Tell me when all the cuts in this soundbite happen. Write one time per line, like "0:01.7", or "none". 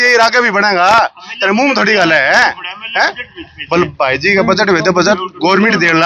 none